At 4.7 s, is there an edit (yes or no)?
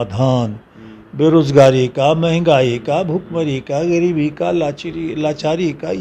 no